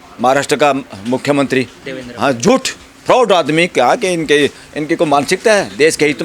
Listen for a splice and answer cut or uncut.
uncut